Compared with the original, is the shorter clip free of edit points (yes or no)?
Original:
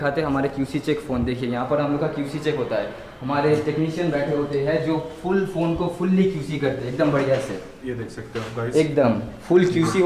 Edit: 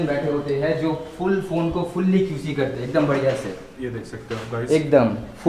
yes